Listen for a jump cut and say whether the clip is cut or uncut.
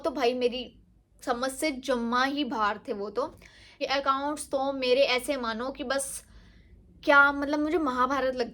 cut